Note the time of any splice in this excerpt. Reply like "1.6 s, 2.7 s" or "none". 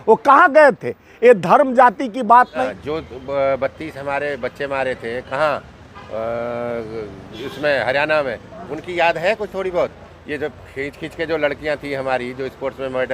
2.6 s